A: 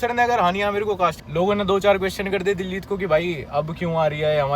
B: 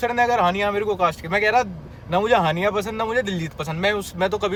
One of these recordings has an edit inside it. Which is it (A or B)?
A